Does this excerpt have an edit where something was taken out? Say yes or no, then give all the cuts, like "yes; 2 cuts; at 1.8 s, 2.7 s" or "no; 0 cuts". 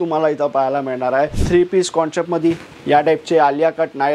yes; 1 cut; at 1.4 s